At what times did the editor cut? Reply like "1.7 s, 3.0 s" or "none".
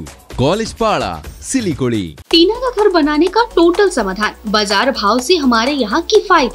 2.2 s